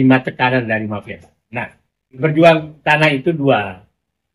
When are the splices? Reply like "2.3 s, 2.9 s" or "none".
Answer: 2.2 s